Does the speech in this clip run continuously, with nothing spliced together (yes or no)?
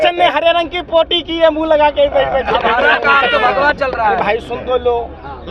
yes